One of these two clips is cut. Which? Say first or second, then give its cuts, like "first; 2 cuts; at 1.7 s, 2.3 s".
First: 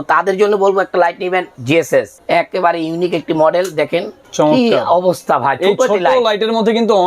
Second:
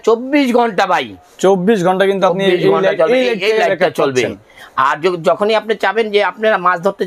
first; 2 cuts; at 1.8 s, 4.2 s